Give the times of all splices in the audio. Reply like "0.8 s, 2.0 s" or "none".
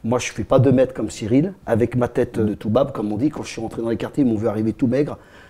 1.6 s, 2.4 s